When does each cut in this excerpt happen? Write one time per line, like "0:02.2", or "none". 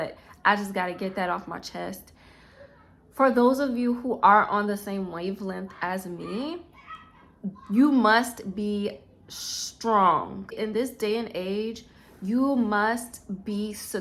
0:10.6